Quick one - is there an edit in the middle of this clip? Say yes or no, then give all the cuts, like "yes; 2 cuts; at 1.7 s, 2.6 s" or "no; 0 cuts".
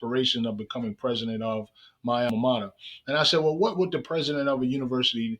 yes; 1 cut; at 2.3 s